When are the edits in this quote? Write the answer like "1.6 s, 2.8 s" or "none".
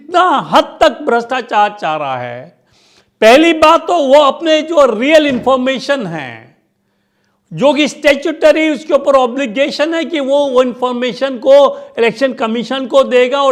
none